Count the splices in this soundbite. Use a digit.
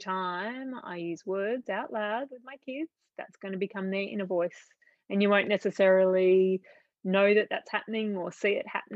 0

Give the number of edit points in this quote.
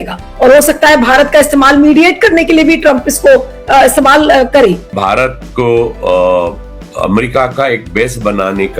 1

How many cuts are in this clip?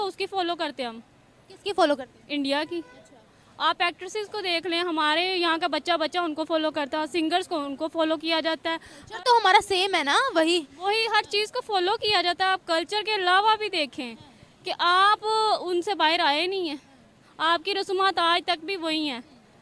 0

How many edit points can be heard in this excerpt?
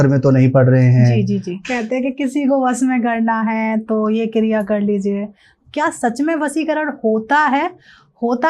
2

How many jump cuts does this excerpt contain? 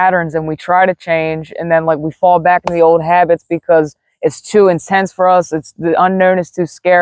0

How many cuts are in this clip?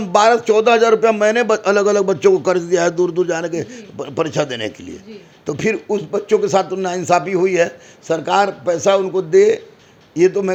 0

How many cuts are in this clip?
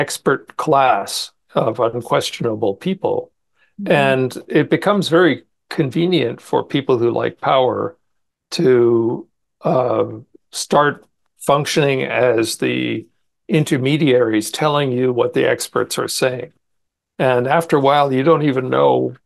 0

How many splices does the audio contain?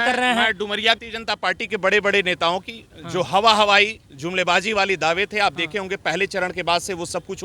1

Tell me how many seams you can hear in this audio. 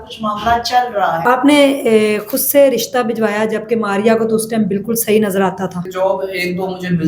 2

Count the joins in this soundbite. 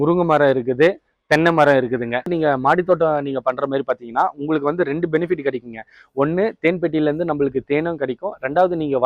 1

